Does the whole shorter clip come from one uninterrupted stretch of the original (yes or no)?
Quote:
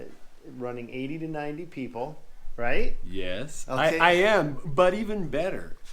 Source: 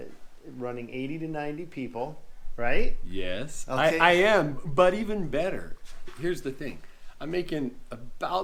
yes